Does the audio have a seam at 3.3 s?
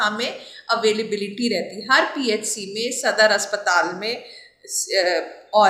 no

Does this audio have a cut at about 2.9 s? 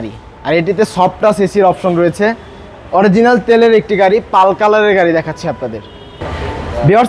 no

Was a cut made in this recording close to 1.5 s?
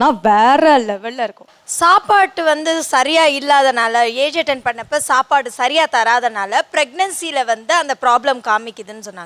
yes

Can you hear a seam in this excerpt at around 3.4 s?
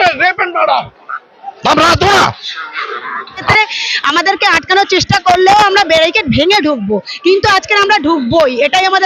yes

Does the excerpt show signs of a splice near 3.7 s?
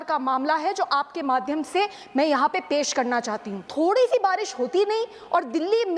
yes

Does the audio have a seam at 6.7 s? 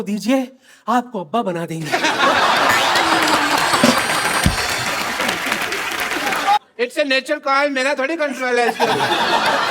yes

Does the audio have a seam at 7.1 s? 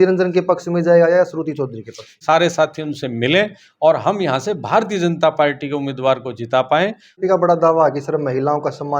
yes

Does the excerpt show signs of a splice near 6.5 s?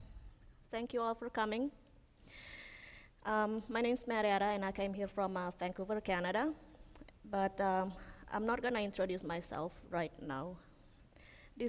no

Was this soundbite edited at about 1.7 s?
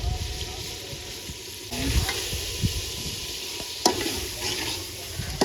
yes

